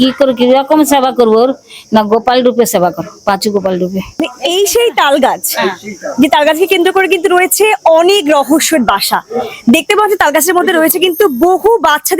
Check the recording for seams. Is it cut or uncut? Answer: cut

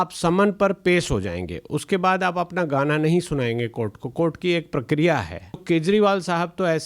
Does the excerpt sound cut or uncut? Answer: cut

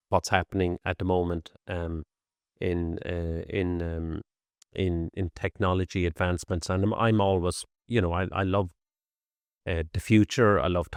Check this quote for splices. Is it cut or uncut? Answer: uncut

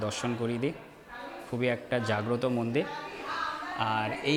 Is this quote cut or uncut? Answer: uncut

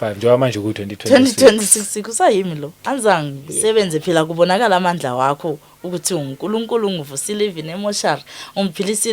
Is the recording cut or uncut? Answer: cut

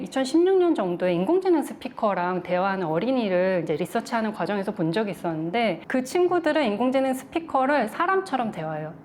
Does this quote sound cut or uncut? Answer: uncut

